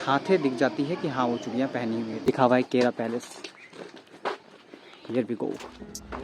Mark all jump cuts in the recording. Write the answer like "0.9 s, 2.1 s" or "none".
2.3 s